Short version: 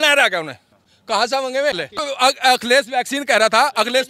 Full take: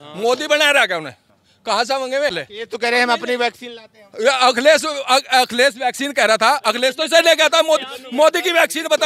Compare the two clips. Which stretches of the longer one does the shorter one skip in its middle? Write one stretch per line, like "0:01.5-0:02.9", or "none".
0:02.6-0:04.9